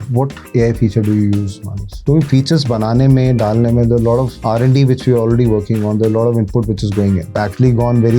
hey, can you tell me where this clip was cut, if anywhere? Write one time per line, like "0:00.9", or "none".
0:01.9
0:07.3